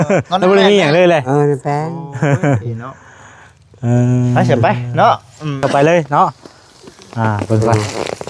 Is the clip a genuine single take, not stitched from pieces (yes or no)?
no